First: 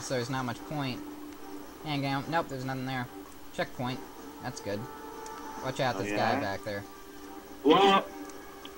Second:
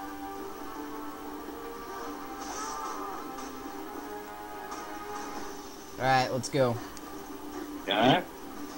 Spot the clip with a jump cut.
second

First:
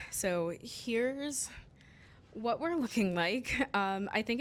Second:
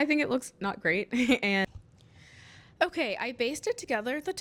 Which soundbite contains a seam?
second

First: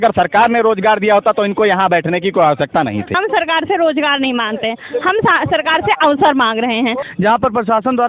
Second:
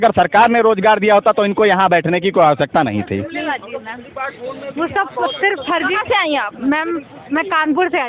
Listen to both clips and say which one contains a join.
first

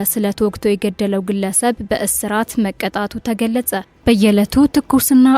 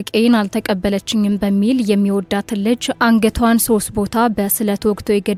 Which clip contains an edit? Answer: first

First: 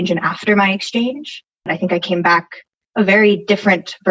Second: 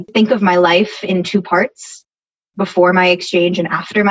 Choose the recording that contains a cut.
first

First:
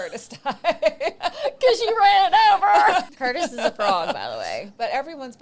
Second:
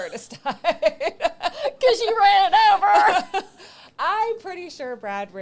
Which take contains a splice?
first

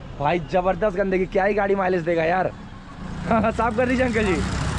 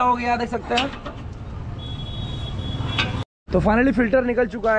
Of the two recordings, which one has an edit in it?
second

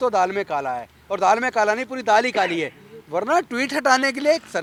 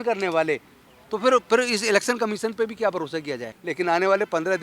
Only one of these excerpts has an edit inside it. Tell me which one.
second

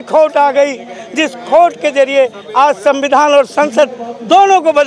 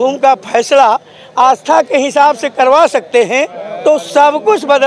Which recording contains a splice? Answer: second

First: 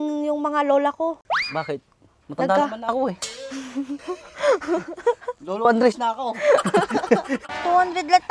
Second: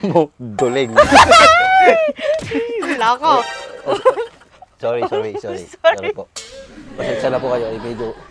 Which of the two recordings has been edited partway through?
first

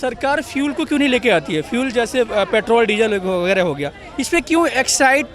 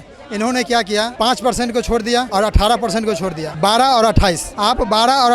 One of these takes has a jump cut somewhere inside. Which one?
second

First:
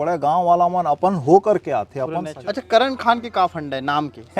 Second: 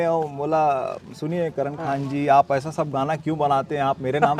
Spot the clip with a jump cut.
first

